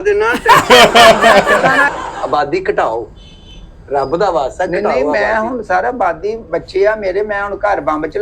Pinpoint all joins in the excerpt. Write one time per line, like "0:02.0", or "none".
0:01.9